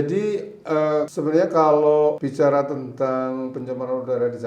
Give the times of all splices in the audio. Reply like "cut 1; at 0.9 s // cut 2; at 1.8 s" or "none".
cut 1; at 1.1 s // cut 2; at 2.2 s